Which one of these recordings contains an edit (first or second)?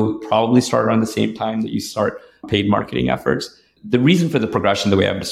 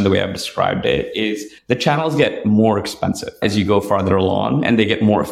second